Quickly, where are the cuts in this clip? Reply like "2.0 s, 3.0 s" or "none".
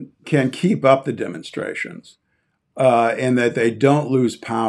none